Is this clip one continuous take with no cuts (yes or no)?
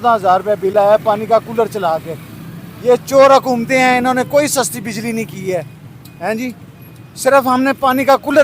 yes